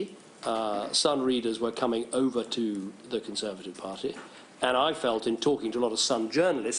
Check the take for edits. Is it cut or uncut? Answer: cut